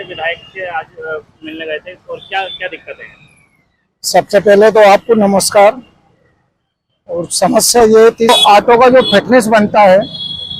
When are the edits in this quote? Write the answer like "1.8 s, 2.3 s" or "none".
8.3 s